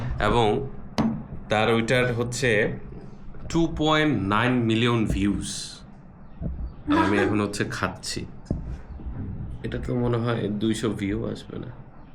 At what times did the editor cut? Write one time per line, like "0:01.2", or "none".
none

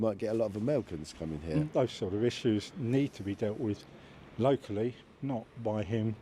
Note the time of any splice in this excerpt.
0:01.7

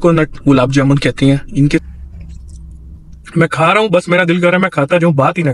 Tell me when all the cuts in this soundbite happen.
0:01.8

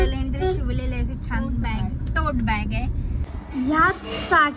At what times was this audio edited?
0:03.1

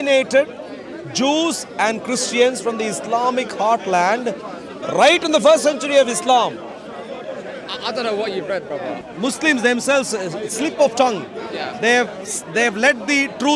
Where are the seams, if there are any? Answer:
0:09.0

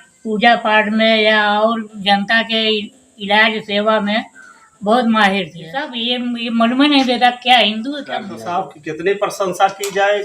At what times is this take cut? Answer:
0:06.0
0:08.4

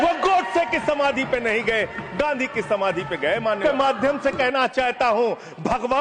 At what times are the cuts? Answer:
0:03.6

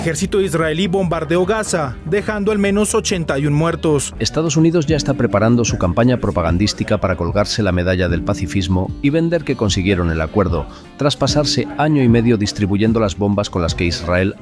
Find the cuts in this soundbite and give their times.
0:04.1

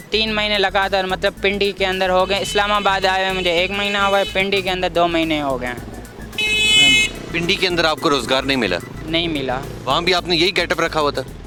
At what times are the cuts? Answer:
none

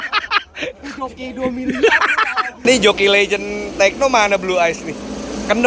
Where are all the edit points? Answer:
0:02.6

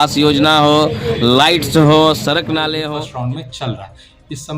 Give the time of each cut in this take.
0:02.8

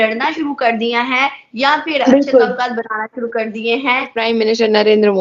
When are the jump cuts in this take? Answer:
0:04.2

